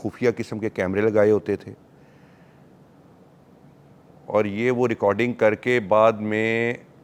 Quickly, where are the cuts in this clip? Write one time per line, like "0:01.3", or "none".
none